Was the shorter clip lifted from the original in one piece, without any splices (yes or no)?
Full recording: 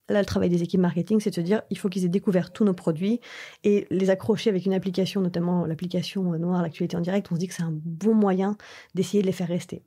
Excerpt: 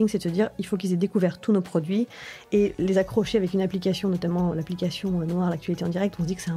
yes